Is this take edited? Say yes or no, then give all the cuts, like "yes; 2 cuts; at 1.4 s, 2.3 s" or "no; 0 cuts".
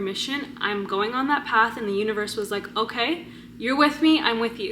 no; 0 cuts